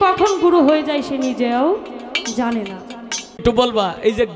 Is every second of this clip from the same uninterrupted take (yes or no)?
no